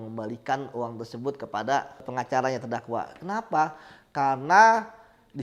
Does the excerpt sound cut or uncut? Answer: cut